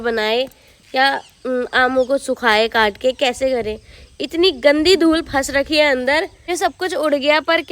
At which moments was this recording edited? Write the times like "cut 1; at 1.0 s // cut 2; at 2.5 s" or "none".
cut 1; at 6.5 s

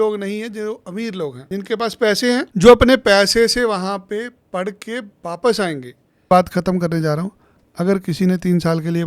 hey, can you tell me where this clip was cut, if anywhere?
cut 1; at 1.4 s // cut 2; at 2.5 s // cut 3; at 6.3 s

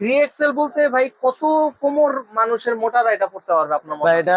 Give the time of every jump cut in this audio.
none

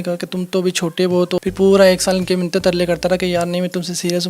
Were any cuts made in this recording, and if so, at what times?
cut 1; at 1.4 s

